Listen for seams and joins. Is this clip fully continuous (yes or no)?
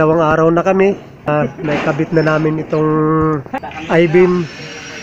no